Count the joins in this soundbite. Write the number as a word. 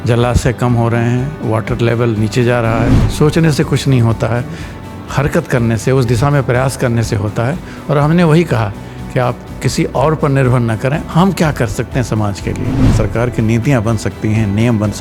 two